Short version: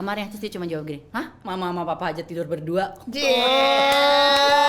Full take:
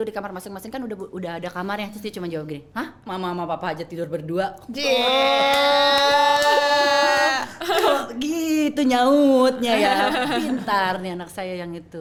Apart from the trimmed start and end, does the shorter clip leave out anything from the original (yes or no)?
no